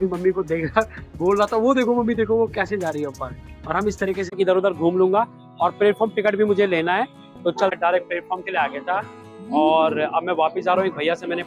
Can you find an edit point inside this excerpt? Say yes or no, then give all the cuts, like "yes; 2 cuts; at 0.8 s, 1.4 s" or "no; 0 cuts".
yes; 2 cuts; at 4.3 s, 7.7 s